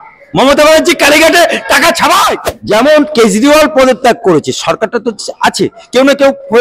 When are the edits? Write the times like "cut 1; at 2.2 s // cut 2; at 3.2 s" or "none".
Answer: cut 1; at 2.5 s